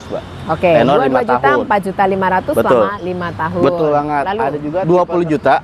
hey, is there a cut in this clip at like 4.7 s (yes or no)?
yes